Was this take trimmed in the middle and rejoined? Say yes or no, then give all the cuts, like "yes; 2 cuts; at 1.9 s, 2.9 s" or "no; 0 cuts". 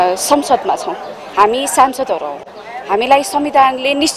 no; 0 cuts